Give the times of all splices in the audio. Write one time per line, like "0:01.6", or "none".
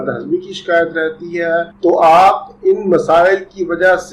0:01.7